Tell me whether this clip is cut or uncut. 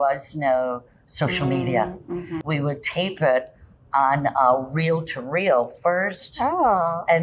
cut